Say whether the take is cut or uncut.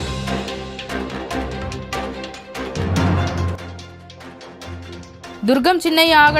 uncut